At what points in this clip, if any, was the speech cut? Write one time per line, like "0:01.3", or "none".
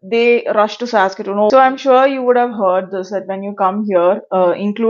0:01.5